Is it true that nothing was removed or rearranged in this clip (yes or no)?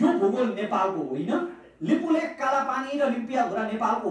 yes